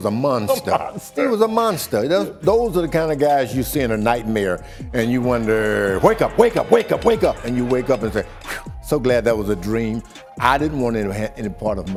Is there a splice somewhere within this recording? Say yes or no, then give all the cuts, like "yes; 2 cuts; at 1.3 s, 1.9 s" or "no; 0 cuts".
no; 0 cuts